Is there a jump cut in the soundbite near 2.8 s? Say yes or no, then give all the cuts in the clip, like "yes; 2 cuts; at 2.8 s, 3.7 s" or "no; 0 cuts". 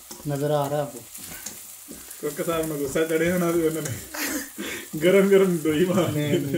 no; 0 cuts